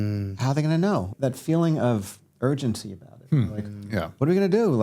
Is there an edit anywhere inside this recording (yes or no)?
yes